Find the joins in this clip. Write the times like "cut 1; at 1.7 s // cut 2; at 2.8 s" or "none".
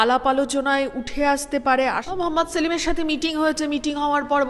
cut 1; at 2.1 s